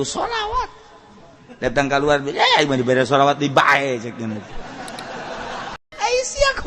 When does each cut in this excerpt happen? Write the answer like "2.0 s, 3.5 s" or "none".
5.8 s